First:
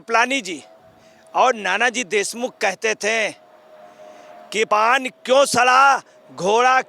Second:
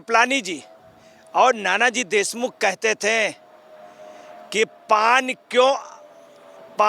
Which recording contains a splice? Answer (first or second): first